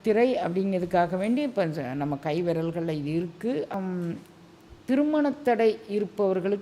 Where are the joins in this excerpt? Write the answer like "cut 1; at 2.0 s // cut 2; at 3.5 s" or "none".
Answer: cut 1; at 3.7 s